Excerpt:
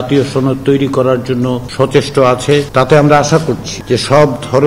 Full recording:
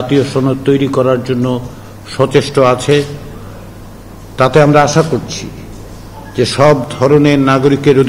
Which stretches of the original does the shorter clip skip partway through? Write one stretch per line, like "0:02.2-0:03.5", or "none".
0:01.6-0:02.0
0:03.1-0:04.3
0:05.4-0:06.2